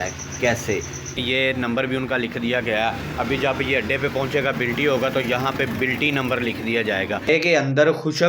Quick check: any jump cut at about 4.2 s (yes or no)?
no